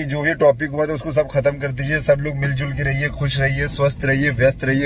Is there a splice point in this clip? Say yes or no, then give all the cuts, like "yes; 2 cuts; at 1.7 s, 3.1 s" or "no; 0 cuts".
no; 0 cuts